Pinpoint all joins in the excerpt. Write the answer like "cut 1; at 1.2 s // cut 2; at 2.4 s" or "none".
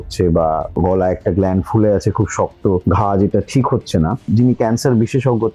cut 1; at 4.2 s